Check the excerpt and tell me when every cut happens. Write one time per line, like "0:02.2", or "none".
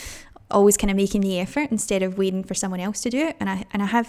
none

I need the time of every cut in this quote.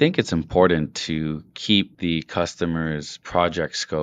0:01.9
0:03.1

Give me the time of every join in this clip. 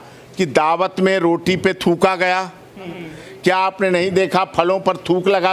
0:03.0

